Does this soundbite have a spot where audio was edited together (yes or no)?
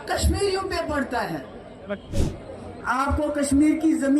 yes